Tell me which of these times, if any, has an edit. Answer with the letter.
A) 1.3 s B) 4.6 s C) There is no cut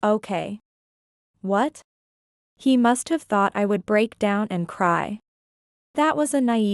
A